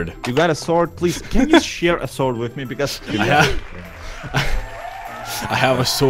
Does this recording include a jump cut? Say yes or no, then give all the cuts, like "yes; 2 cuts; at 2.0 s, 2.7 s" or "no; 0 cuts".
no; 0 cuts